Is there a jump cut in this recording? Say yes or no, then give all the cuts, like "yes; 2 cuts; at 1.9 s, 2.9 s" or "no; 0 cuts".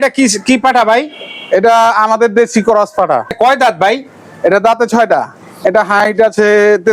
yes; 2 cuts; at 3.3 s, 5.5 s